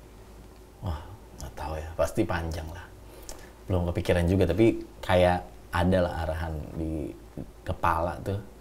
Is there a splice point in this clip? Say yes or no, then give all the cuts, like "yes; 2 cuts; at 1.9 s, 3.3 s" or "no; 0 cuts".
no; 0 cuts